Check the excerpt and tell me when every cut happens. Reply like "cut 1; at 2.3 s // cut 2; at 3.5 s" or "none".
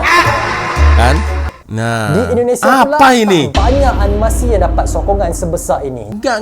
cut 1; at 1.5 s